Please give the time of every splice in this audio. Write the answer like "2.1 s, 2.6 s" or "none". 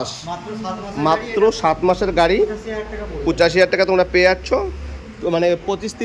none